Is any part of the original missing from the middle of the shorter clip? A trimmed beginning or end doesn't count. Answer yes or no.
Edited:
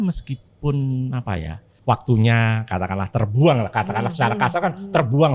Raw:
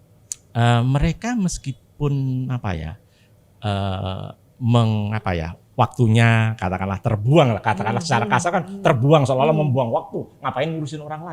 yes